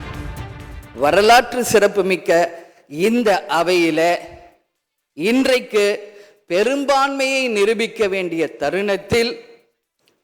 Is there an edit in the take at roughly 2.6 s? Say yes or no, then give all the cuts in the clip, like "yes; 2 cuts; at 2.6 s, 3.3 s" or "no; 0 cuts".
no; 1 cut; at 1.0 s